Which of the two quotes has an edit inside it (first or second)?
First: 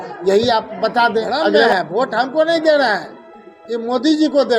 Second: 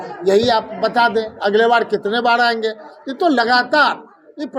first